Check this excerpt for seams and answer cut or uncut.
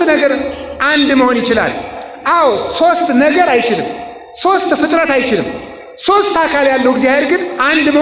uncut